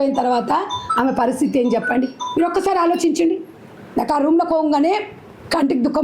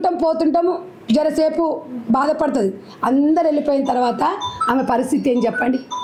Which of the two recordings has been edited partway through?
first; 1 cut; at 3.6 s

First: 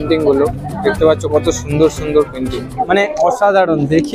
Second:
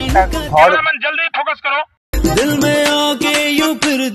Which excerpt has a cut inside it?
first; 1 cut; at 2.8 s

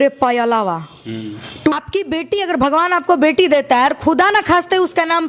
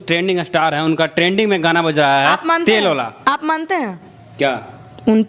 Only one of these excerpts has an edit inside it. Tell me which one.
first; 1 cut; at 1.7 s

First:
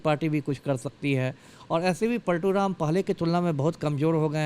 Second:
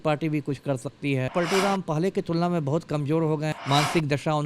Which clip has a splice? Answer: second; 2 cuts; at 1.3 s, 3.5 s

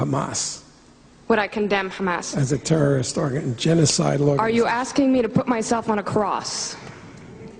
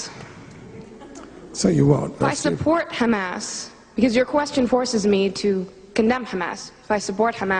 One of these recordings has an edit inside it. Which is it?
first; 1 cut; at 4.9 s

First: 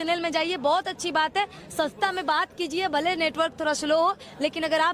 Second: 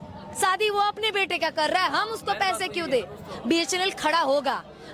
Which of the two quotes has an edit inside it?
second; 1 cut; at 3.2 s

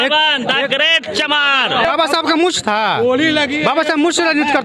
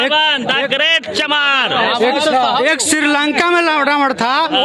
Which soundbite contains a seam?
first; 1 cut; at 1.9 s

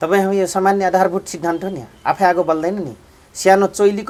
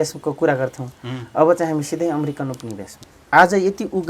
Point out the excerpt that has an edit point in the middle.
second; 1 cut; at 2.9 s

